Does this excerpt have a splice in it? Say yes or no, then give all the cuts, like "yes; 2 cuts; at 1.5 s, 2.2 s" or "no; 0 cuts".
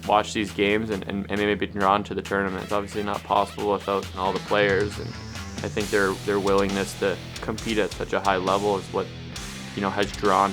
yes; 2 cuts; at 2.7 s, 4.1 s